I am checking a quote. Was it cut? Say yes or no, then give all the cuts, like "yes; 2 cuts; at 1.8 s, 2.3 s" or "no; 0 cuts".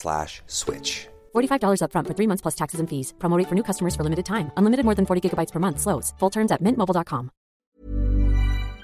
yes; 1 cut; at 7.8 s